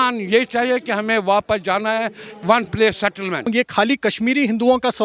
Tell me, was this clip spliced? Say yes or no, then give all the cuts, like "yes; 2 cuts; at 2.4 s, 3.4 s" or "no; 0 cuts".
yes; 1 cut; at 3.5 s